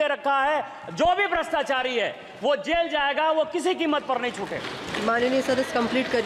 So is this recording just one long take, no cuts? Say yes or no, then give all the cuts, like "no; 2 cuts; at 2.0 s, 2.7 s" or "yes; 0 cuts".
yes; 0 cuts